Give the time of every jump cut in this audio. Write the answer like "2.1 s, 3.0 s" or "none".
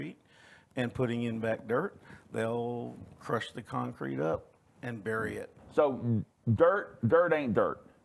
5.6 s